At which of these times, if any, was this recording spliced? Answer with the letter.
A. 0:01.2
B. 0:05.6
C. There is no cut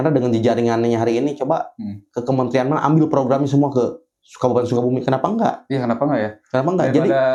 C